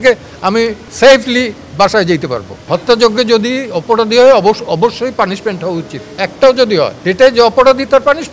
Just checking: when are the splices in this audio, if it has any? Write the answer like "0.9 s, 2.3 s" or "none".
2.5 s, 6.2 s, 7.0 s